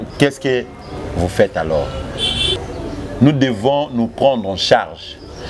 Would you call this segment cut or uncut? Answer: cut